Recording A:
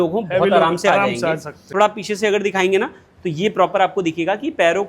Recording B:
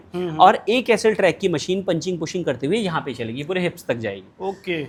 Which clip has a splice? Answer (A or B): A